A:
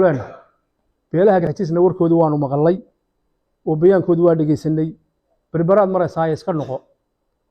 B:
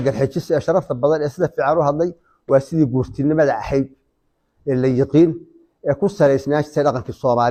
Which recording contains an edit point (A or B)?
A